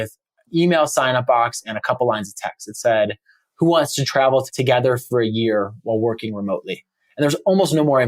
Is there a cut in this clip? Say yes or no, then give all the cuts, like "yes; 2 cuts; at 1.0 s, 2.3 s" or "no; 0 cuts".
no; 0 cuts